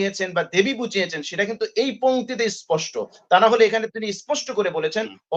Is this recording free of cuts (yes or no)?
yes